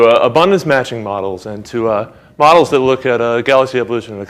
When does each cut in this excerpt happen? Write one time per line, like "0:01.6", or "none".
0:00.9